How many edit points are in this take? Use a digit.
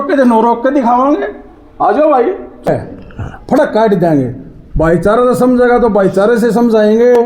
1